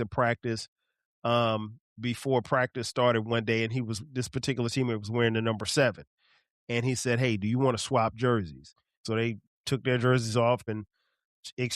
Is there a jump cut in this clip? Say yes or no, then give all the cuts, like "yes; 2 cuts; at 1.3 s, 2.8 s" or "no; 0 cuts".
yes; 2 cuts; at 9.0 s, 10.6 s